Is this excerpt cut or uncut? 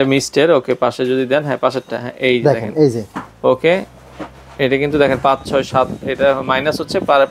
uncut